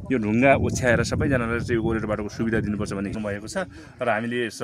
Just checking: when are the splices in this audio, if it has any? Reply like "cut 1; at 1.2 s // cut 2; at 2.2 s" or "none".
cut 1; at 3.2 s